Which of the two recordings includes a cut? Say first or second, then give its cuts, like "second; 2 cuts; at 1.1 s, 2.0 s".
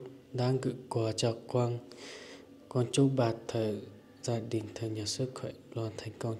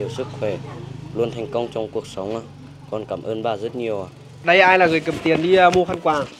second; 1 cut; at 4.2 s